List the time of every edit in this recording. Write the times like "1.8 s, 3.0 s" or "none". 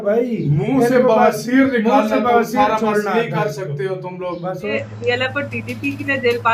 4.8 s